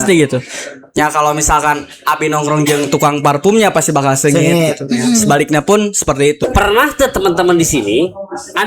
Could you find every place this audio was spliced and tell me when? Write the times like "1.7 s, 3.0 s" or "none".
6.4 s